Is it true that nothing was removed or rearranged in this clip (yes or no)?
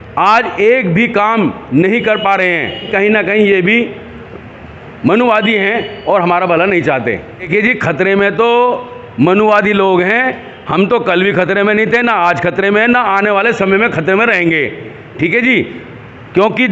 no